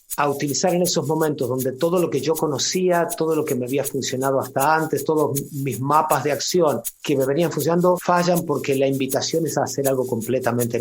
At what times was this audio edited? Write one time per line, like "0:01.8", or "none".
0:06.9
0:08.0

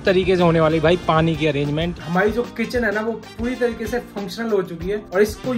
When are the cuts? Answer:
0:02.0

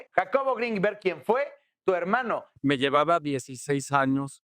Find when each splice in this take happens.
0:02.6

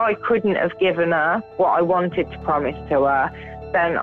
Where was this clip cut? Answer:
0:01.5

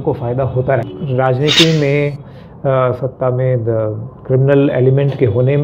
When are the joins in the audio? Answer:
0:00.9

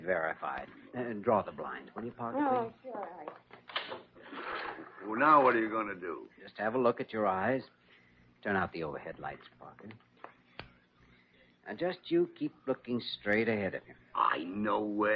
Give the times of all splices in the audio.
0:09.2

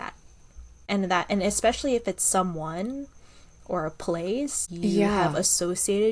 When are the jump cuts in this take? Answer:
0:00.8
0:04.6

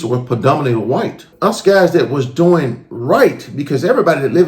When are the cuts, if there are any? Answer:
0:01.3

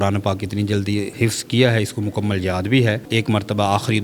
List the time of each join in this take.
0:01.1
0:03.0

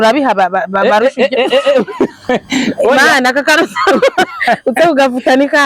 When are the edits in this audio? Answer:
none

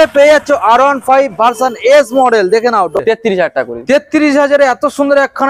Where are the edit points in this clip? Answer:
0:03.0

